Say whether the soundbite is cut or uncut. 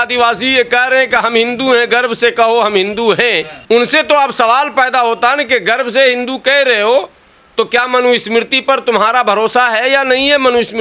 uncut